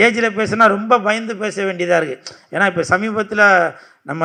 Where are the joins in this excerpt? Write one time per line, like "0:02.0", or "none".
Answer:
none